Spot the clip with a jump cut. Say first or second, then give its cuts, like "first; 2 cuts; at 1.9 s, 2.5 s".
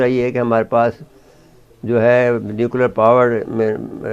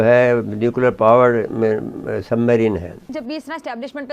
second; 1 cut; at 3.1 s